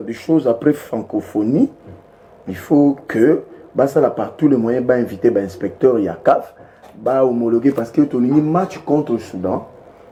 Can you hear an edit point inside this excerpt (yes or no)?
no